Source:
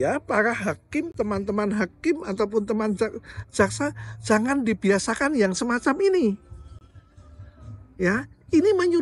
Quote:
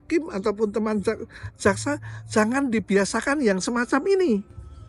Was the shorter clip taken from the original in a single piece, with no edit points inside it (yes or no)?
yes